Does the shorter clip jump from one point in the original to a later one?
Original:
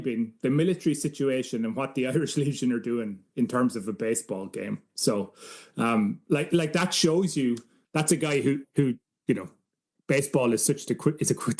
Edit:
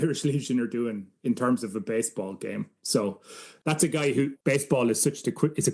yes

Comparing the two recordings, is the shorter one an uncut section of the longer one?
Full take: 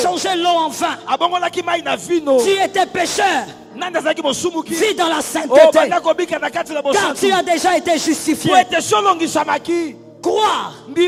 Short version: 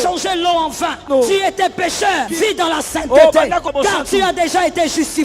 no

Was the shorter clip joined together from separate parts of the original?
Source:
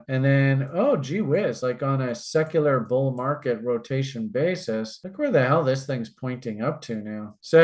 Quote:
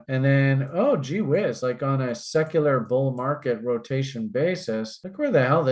no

